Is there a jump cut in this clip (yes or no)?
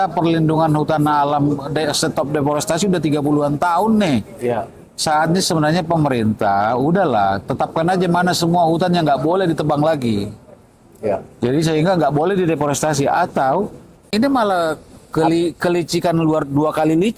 yes